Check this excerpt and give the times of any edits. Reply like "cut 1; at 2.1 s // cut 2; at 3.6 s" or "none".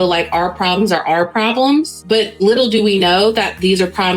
cut 1; at 2.4 s